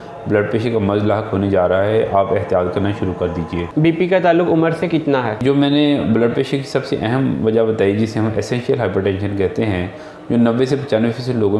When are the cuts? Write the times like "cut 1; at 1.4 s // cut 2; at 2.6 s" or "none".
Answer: none